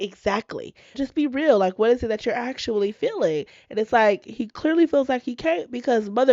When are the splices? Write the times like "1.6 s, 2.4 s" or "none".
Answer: 1.0 s